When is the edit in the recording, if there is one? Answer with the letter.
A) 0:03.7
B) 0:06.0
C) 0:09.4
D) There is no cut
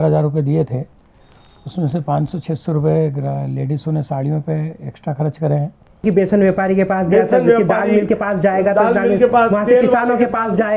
B